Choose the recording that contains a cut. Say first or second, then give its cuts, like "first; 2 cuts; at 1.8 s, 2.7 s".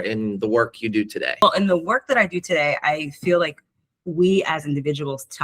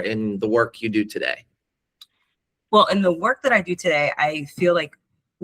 first; 1 cut; at 1.4 s